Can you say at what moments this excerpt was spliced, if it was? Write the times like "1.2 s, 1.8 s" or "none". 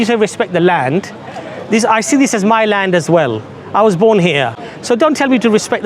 4.7 s